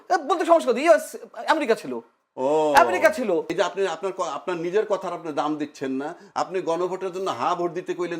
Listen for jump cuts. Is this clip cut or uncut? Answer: cut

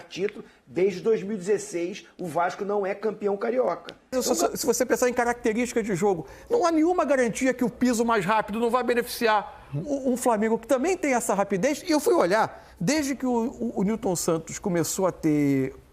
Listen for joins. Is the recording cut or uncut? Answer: cut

